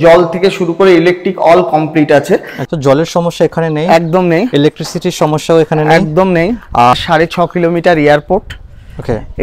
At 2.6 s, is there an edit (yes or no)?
yes